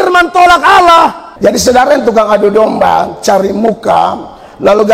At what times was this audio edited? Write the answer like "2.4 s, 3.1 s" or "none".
1.2 s